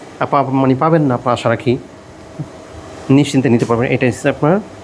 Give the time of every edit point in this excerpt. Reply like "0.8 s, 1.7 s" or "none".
none